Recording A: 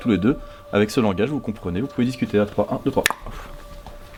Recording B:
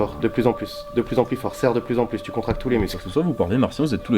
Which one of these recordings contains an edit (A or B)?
B